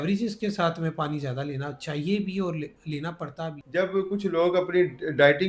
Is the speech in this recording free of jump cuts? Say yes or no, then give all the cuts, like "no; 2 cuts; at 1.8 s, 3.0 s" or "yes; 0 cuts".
no; 1 cut; at 3.5 s